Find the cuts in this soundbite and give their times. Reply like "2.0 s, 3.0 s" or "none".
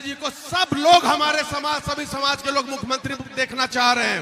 none